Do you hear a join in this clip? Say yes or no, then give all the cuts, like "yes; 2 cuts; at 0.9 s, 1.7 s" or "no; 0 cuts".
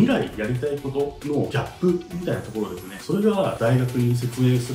no; 0 cuts